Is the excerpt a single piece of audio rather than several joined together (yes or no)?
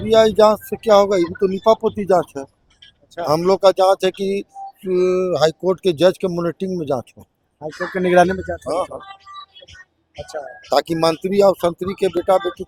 yes